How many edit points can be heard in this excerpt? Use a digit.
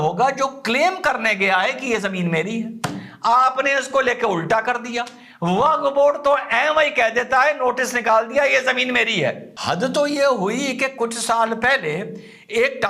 1